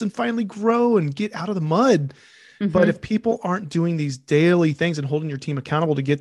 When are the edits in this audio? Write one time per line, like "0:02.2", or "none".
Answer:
none